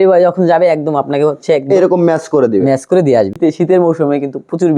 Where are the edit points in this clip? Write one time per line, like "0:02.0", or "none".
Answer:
0:03.4